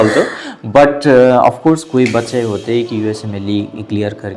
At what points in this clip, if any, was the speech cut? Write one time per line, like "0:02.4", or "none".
none